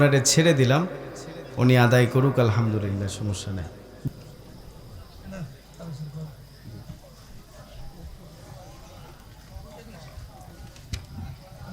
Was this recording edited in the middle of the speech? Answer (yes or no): yes